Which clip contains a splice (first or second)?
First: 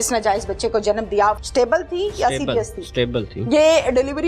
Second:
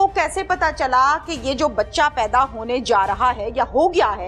first